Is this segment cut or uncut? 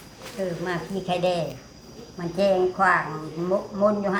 uncut